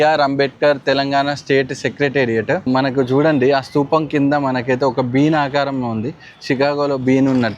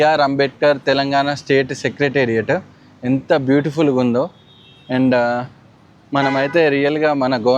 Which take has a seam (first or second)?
first